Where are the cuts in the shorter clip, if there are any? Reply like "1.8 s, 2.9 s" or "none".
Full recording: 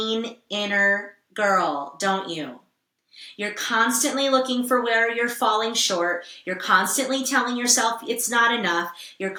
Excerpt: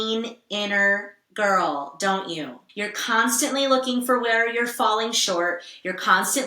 2.6 s